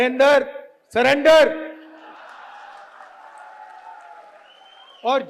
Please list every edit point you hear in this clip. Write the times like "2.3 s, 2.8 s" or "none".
2.1 s